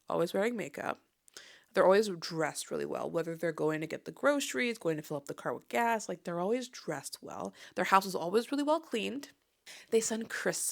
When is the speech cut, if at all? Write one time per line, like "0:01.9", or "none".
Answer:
0:07.6
0:09.7

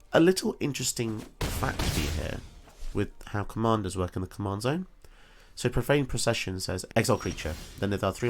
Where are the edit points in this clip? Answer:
0:06.8

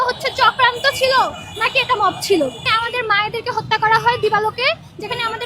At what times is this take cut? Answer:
0:02.7

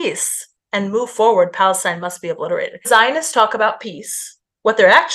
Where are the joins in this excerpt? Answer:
0:02.9

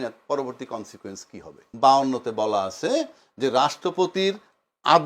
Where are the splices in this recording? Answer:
0:01.6

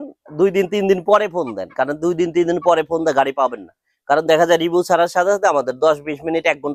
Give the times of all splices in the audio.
none

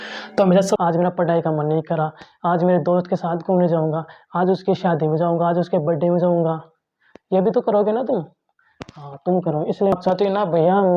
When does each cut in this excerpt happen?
0:00.8
0:09.9

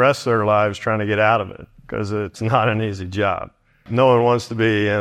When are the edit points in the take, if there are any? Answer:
0:02.4
0:03.9

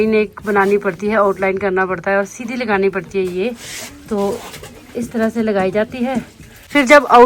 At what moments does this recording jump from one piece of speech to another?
none

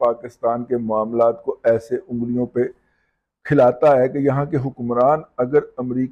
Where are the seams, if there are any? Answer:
none

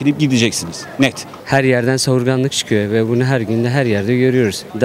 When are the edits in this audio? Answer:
0:01.3

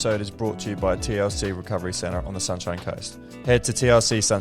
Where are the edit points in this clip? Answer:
0:03.2

